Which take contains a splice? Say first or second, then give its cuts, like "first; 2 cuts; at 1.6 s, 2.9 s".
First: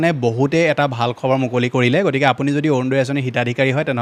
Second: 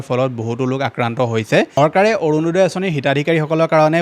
second; 1 cut; at 1.8 s